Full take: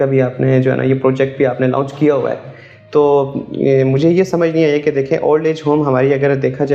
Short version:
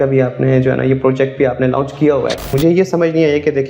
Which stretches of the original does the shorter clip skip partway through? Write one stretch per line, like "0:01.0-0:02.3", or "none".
0:02.5-0:03.9